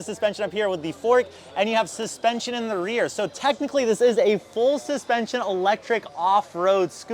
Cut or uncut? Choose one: uncut